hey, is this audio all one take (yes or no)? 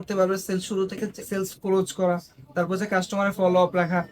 no